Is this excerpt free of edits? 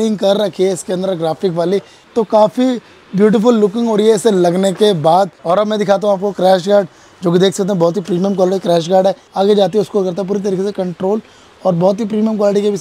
no; 3 cuts; at 1.9 s, 5.4 s, 9.2 s

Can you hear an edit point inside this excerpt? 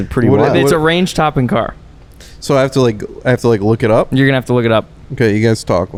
no; 0 cuts

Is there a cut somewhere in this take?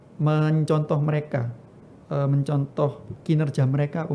yes; 1 cut; at 3.1 s

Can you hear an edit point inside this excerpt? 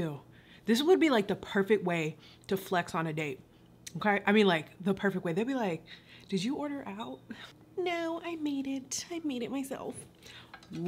no; 0 cuts

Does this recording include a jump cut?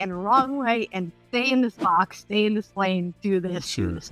no; 0 cuts

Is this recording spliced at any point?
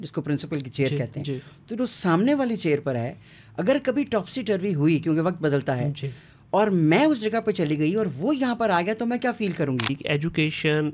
yes; 1 cut; at 10.0 s

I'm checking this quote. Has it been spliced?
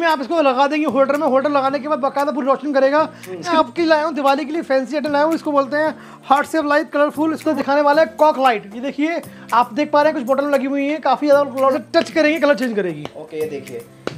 yes; 3 cuts; at 3.5 s, 7.5 s, 11.7 s

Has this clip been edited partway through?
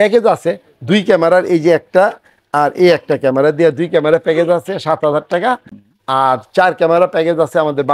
no; 0 cuts

